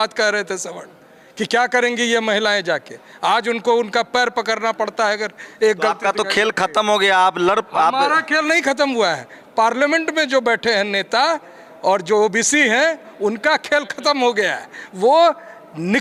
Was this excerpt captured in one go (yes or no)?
yes